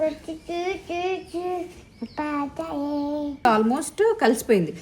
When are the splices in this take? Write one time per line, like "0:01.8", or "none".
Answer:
0:03.4